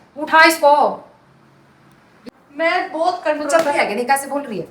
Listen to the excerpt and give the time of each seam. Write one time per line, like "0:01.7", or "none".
0:02.3